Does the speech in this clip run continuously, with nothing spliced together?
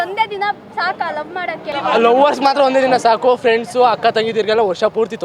no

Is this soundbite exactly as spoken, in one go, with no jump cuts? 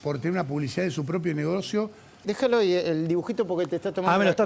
no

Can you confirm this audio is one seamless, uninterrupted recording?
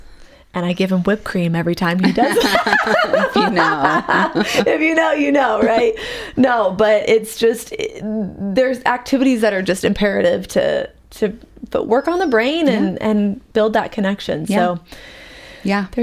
yes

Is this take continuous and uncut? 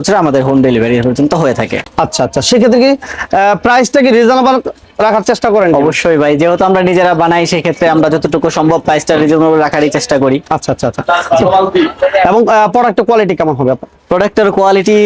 yes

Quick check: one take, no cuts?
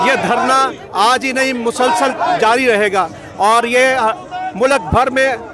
yes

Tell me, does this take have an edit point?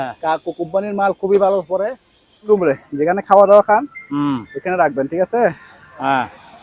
yes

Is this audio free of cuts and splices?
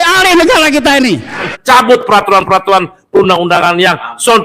no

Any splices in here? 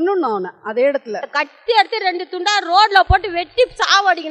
yes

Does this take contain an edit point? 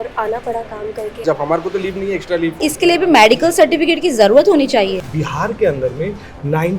yes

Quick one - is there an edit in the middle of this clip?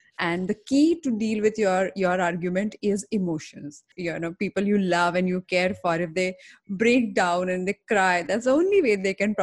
yes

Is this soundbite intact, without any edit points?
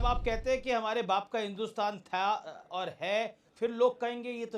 no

